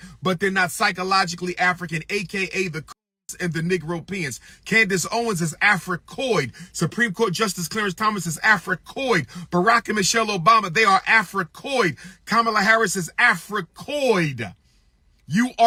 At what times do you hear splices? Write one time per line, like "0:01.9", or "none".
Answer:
none